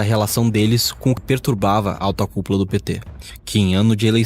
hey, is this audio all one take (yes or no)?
no